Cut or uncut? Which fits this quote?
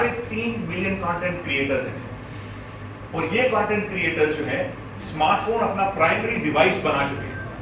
uncut